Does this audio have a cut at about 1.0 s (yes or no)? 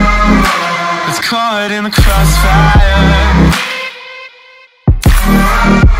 yes